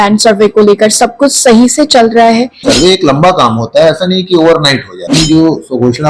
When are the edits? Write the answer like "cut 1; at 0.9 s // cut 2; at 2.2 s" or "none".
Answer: cut 1; at 2.6 s // cut 2; at 5.1 s